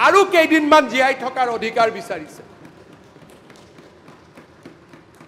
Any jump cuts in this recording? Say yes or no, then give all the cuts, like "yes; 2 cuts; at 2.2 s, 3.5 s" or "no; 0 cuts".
no; 0 cuts